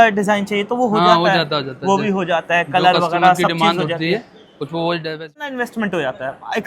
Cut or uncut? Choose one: cut